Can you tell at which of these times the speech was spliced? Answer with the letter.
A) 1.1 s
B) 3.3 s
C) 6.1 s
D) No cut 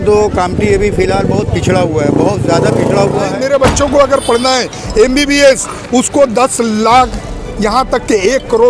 B